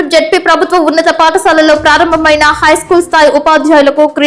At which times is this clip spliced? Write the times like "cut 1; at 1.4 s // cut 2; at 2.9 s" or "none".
none